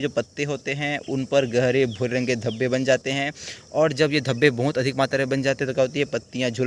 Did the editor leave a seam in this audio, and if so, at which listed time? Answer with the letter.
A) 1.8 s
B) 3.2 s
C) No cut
C